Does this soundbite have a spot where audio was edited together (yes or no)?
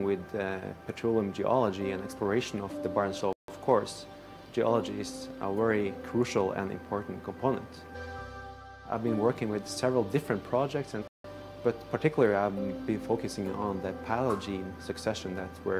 yes